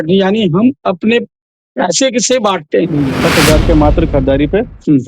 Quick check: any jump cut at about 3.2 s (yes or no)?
yes